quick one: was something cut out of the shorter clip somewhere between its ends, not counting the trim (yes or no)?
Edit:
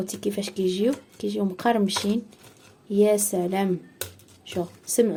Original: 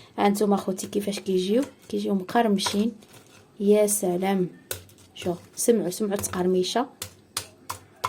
no